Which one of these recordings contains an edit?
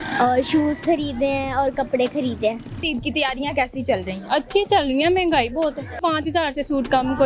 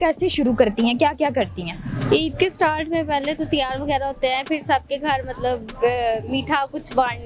first; 2 cuts; at 2.8 s, 6.0 s

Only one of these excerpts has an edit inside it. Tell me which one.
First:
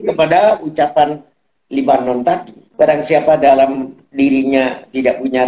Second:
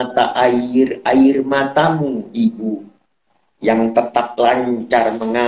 first; 1 cut; at 2.6 s

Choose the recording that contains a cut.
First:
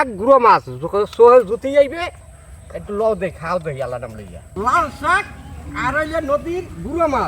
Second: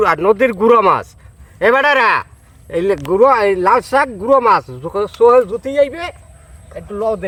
first; 1 cut; at 4.6 s

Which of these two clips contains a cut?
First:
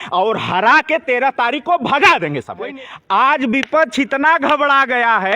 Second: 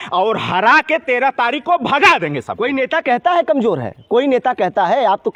first; 1 cut; at 2.7 s

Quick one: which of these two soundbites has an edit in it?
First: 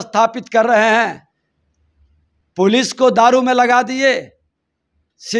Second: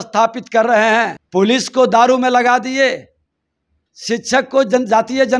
second; 1 cut; at 1.2 s

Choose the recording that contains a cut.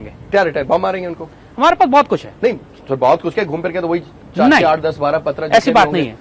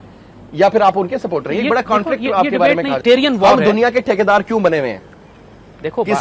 second; 1 cut; at 3.0 s

